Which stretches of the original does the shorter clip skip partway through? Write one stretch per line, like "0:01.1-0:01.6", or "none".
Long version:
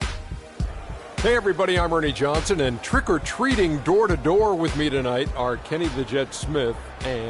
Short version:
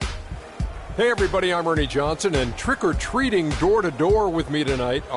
0:01.0-0:01.2